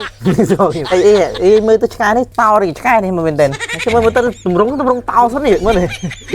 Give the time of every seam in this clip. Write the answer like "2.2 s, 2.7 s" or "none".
0.8 s, 2.3 s, 3.7 s